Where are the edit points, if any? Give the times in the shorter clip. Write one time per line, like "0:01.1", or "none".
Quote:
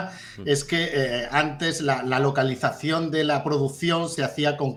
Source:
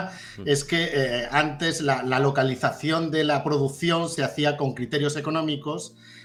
none